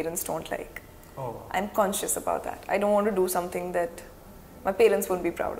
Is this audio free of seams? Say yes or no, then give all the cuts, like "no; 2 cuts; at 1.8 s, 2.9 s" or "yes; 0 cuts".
yes; 0 cuts